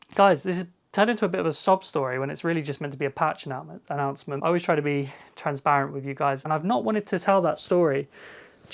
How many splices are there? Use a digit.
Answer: 2